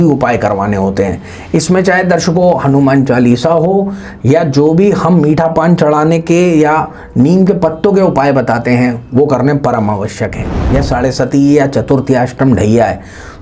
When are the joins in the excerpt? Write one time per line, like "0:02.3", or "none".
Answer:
0:10.6